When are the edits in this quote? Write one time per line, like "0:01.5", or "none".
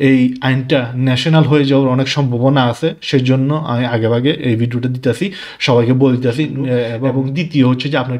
0:07.0